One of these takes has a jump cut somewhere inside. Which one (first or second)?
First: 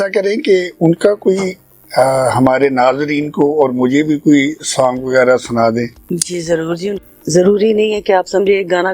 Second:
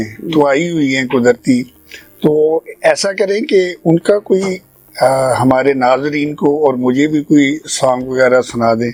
first